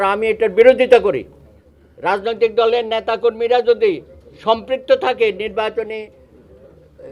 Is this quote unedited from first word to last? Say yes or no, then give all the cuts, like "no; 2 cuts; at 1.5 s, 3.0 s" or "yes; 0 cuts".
yes; 0 cuts